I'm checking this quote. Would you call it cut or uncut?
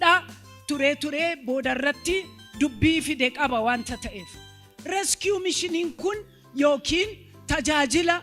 uncut